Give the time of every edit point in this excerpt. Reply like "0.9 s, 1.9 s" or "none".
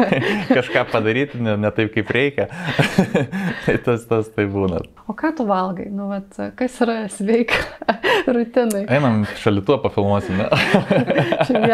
5.0 s